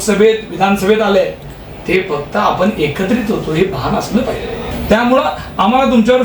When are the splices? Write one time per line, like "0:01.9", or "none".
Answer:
0:04.7